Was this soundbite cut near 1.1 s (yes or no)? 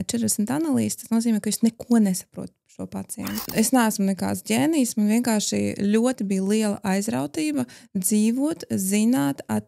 no